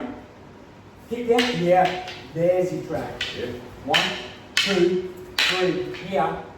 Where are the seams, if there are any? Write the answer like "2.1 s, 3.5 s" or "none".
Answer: 3.7 s